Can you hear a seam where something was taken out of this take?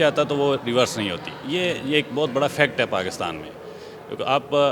no; 0 cuts

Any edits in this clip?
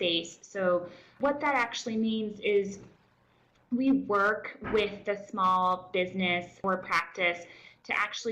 yes; 2 cuts; at 1.1 s, 6.6 s

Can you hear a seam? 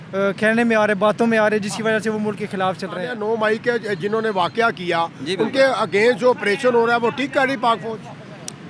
yes; 1 cut; at 3.1 s

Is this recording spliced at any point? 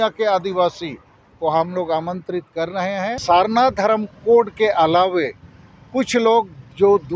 yes; 1 cut; at 3.2 s

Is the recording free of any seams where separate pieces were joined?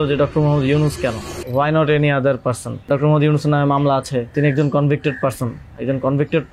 no; 3 cuts; at 1.3 s, 2.9 s, 4.3 s

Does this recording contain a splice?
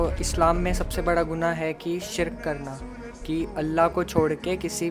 no; 0 cuts

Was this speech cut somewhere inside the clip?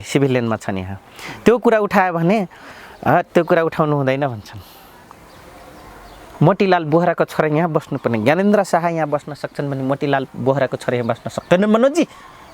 no; 0 cuts

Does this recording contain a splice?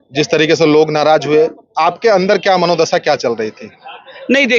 no; 0 cuts

